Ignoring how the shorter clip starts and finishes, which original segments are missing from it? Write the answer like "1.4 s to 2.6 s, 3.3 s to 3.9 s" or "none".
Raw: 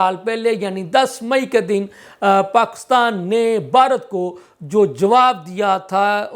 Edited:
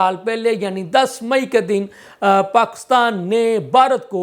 none